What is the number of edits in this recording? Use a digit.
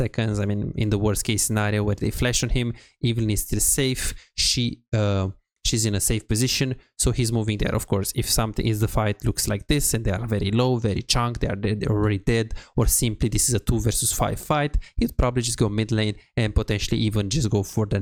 0